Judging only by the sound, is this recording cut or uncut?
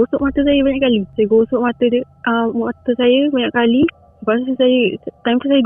cut